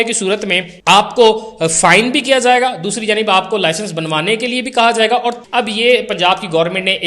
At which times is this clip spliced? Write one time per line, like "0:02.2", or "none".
0:05.4